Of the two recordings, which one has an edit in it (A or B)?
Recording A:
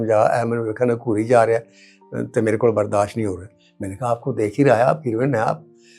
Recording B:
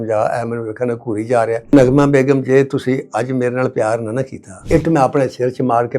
B